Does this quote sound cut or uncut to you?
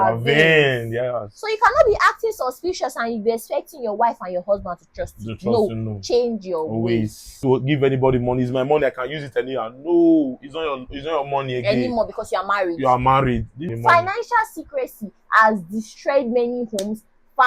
cut